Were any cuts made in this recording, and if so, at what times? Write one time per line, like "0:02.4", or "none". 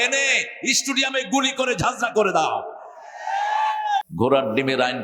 0:04.1